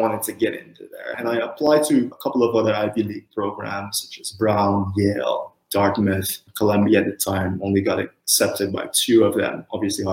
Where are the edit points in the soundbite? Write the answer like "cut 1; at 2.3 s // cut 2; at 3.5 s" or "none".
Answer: cut 1; at 1.1 s // cut 2; at 2.1 s